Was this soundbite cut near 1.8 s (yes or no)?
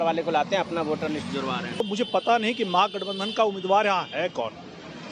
yes